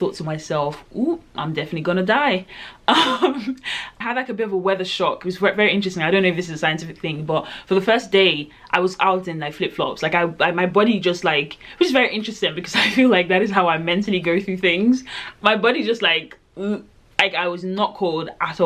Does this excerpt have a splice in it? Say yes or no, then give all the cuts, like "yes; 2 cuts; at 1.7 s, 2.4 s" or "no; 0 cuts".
no; 0 cuts